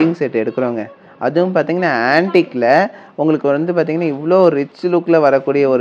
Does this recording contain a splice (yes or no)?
no